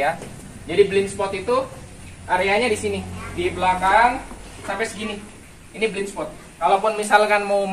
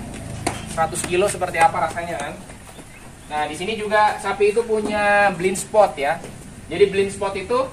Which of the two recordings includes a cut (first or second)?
first